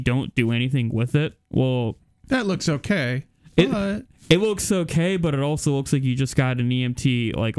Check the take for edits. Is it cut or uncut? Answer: uncut